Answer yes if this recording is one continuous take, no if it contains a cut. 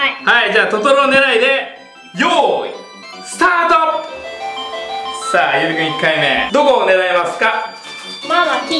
no